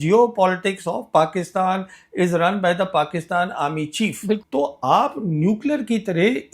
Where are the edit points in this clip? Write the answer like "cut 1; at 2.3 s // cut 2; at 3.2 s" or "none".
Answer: cut 1; at 4.4 s